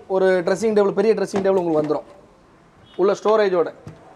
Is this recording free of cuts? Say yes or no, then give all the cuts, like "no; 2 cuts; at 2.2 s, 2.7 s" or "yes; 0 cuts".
yes; 0 cuts